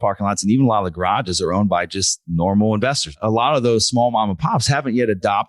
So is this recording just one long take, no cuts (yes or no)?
no